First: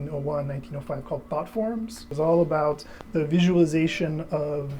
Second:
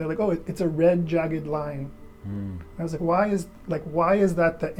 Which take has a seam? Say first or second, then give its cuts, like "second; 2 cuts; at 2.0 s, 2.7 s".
first; 1 cut; at 2.0 s